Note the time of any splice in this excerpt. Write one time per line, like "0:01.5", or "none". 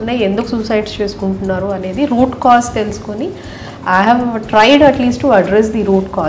none